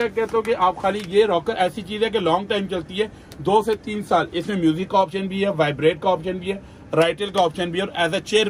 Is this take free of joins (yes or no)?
yes